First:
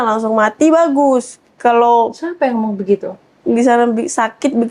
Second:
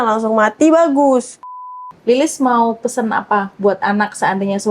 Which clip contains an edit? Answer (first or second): second